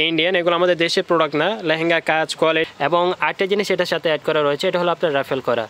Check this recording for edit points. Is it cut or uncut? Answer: cut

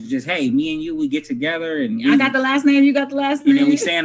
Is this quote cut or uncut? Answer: uncut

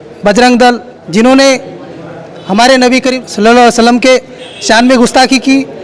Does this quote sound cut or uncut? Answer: cut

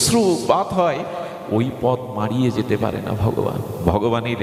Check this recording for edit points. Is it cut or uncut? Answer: uncut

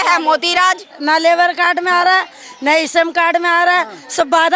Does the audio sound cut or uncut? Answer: cut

